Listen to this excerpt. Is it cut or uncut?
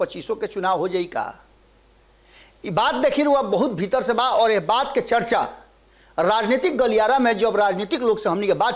uncut